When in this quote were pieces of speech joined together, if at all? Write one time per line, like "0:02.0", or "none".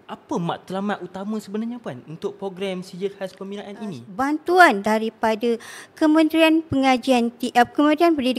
0:04.0